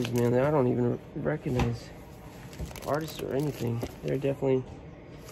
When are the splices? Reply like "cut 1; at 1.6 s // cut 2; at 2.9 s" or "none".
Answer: none